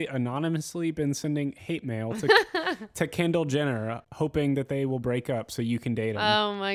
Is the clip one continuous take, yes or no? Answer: yes